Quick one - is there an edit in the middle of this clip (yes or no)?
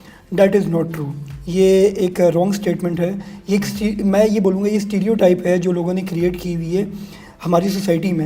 no